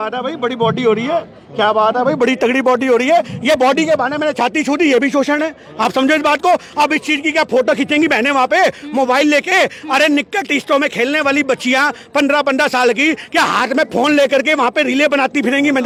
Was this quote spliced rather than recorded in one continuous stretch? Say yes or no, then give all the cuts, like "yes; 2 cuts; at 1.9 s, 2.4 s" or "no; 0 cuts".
no; 0 cuts